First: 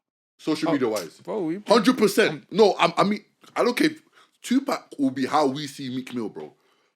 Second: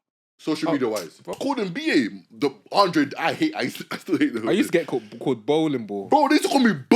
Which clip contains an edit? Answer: second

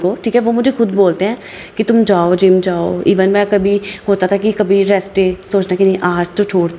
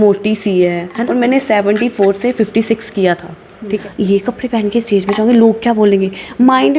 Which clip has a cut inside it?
second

